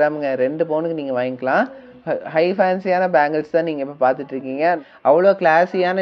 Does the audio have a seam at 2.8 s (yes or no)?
no